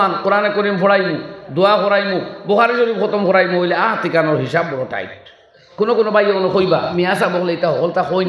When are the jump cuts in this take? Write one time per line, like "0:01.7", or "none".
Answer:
0:05.6
0:06.9